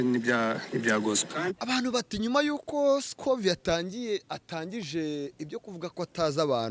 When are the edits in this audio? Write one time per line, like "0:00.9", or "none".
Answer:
0:01.6